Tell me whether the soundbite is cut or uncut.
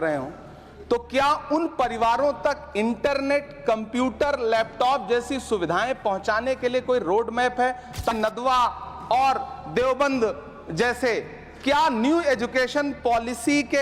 cut